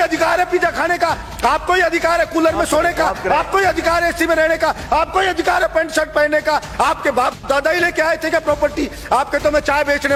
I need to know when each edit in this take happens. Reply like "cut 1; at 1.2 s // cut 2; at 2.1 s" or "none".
none